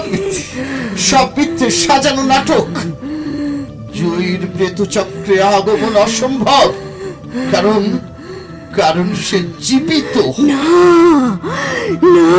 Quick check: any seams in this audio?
no; 0 cuts

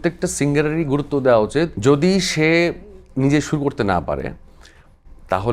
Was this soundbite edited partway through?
yes; 1 cut; at 1.8 s

